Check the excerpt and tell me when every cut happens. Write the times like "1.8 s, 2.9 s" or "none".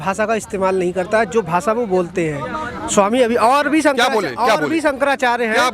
none